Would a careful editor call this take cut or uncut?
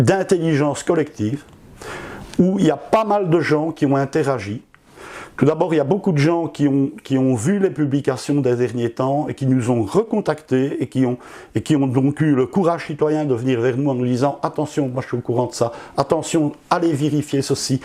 uncut